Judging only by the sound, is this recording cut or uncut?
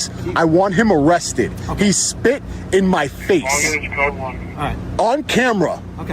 uncut